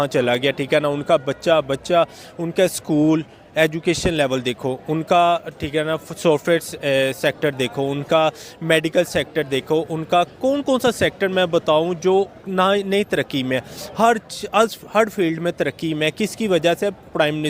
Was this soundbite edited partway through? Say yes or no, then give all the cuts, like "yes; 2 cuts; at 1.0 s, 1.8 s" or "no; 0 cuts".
no; 0 cuts